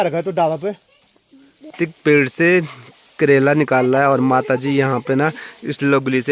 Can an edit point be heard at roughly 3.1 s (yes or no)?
no